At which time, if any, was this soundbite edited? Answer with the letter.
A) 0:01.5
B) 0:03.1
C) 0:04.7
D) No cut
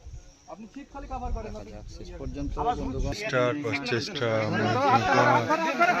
B